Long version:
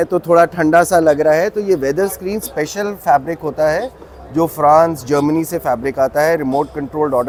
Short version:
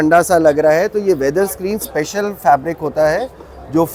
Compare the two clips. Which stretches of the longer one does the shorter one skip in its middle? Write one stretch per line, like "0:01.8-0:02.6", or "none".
none